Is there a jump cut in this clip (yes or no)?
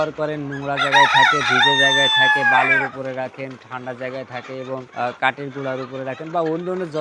yes